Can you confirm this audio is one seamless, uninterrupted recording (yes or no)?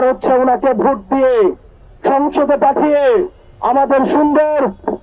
yes